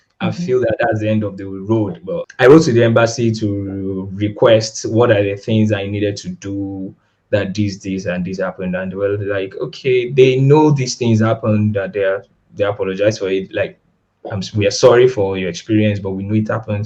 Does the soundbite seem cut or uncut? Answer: cut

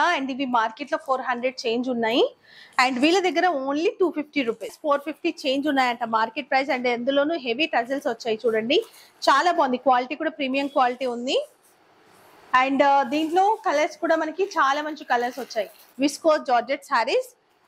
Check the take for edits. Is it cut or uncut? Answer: cut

